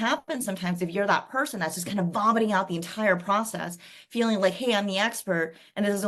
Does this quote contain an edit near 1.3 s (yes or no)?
no